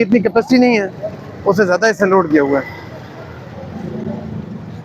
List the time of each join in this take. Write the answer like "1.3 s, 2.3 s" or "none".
none